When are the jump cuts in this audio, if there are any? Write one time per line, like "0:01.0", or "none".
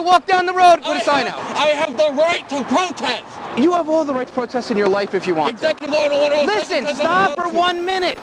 0:01.4
0:03.4